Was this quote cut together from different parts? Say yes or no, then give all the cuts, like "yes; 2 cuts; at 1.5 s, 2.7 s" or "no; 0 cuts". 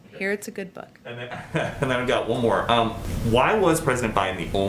no; 0 cuts